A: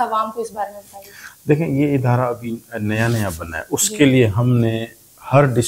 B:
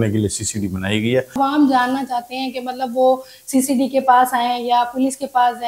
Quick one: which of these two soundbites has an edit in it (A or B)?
B